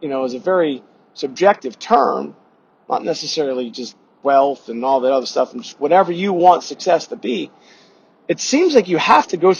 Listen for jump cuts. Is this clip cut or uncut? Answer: uncut